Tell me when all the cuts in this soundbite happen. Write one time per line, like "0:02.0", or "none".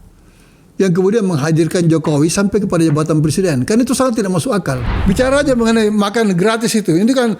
0:04.9